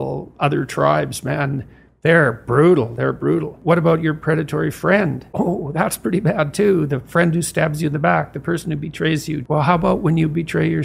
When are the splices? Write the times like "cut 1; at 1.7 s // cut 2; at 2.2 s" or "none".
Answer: cut 1; at 3.5 s // cut 2; at 5.2 s // cut 3; at 9.4 s